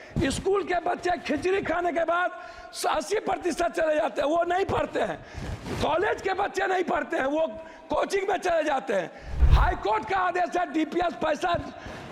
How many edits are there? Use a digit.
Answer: 1